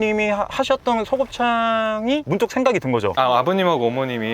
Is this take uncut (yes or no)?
no